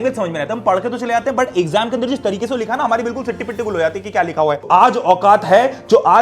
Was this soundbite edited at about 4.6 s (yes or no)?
yes